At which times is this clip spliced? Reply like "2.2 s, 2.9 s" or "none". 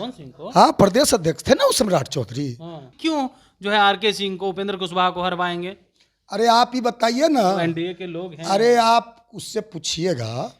2.9 s